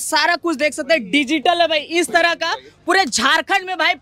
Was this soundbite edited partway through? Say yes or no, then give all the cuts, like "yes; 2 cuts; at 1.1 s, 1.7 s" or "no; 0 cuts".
no; 0 cuts